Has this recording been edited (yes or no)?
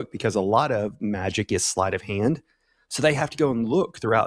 no